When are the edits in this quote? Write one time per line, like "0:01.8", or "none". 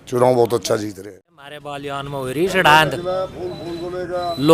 0:01.8